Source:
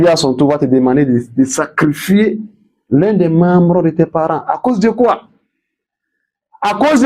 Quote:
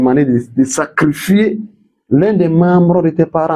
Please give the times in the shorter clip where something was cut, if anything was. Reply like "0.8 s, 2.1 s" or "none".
none